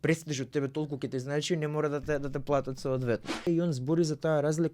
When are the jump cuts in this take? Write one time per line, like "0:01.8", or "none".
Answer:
0:03.5

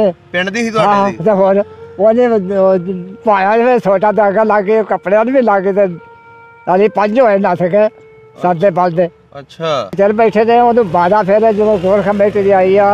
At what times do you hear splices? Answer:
0:10.0

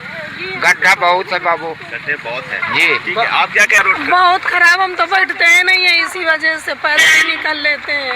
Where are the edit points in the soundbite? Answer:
0:03.8

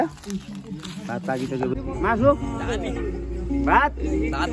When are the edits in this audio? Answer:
0:01.7

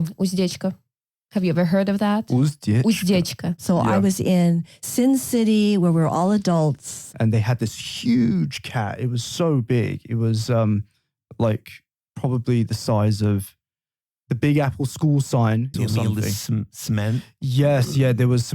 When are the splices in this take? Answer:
0:03.6
0:06.9
0:15.7

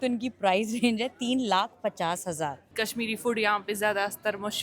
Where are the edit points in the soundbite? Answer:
0:02.6

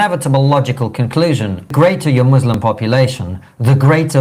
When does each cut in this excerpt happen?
0:01.7

